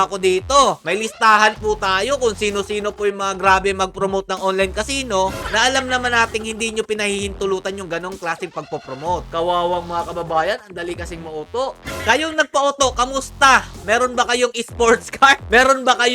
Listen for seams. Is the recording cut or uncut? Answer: cut